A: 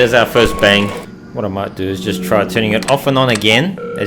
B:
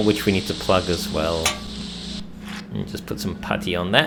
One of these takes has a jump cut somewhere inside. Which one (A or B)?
A